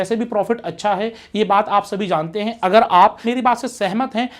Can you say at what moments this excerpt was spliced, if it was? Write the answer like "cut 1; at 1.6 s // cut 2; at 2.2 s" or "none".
none